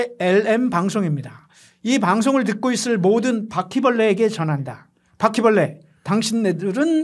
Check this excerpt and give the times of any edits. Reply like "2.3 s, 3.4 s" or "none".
none

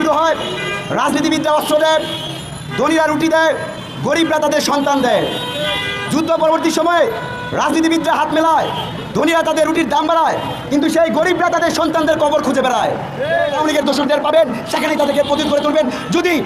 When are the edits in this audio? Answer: 13.6 s

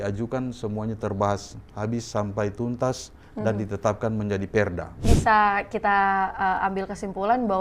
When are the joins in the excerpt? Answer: 5.1 s

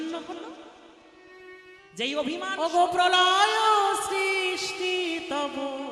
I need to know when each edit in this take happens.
2.5 s

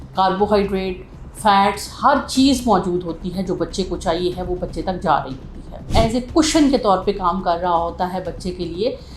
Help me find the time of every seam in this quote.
5.9 s

